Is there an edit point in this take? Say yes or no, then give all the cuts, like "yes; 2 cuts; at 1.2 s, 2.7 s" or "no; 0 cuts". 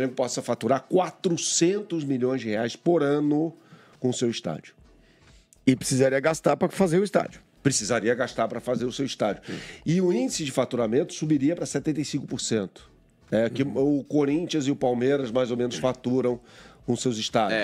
no; 0 cuts